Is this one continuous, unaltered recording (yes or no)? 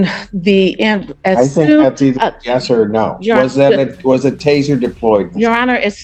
yes